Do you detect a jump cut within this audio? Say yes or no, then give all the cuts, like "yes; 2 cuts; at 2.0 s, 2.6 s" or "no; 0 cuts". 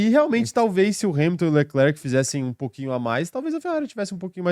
no; 0 cuts